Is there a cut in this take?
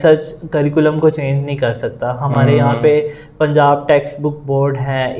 no; 0 cuts

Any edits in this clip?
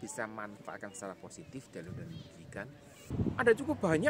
yes; 1 cut; at 3.0 s

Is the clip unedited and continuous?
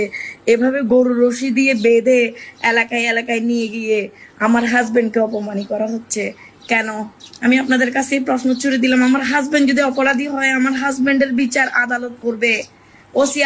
no; 1 cut; at 7.2 s

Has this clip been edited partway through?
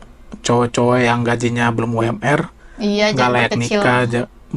no; 0 cuts

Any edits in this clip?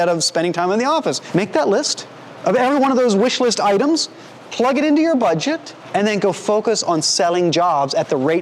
yes; 2 cuts; at 1.2 s, 5.7 s

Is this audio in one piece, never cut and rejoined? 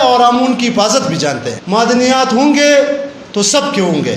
no; 1 cut; at 1.5 s

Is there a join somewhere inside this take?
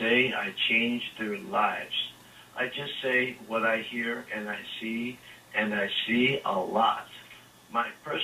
yes; 1 cut; at 3.1 s

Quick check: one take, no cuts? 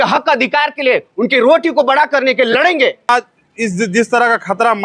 no; 1 cut; at 3.1 s

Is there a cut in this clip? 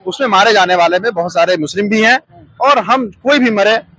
no; 0 cuts

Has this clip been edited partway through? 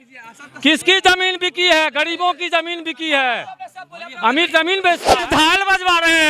yes; 1 cut; at 5.3 s

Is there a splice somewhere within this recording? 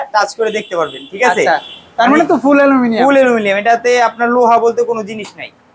no; 0 cuts

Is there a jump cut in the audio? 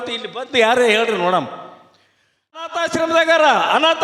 yes; 1 cut; at 2.6 s

